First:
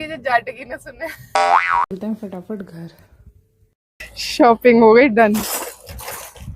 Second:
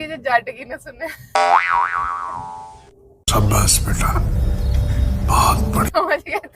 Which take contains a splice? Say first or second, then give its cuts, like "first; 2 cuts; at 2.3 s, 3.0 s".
first; 1 cut; at 1.9 s